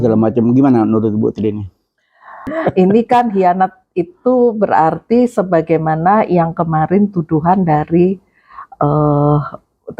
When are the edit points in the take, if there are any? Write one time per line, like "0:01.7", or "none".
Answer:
0:02.5